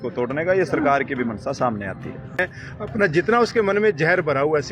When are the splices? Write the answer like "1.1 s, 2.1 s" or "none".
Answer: 2.4 s